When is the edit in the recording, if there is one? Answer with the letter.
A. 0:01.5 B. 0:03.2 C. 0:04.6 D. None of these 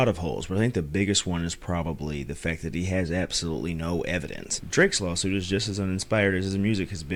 D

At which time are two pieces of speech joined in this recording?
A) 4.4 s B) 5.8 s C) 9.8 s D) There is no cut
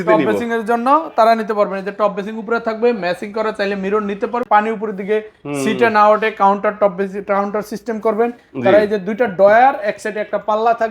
A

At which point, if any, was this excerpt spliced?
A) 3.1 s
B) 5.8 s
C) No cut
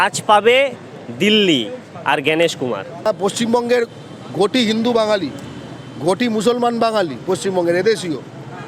A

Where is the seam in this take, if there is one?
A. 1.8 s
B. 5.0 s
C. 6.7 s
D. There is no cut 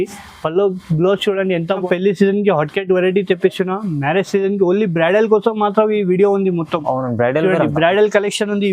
A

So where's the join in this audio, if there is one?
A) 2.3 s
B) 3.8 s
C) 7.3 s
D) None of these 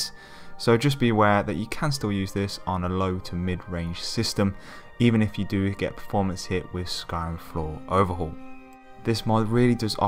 D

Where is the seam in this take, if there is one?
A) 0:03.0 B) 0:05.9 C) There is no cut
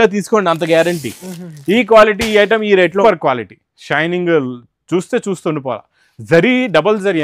A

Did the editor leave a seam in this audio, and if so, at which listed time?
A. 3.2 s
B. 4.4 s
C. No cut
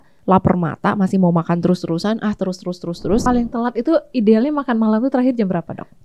A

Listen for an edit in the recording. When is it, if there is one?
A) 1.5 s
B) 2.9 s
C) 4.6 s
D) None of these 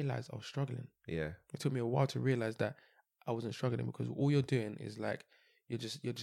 D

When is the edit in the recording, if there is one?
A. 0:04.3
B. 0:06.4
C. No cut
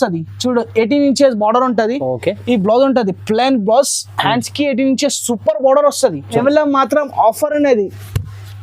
B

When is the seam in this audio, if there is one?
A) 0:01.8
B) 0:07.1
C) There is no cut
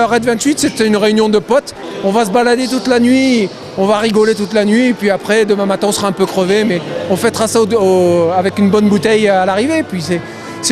A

